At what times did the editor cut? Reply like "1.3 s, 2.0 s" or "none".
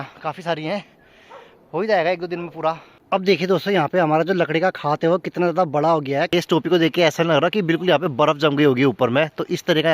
2.9 s, 6.3 s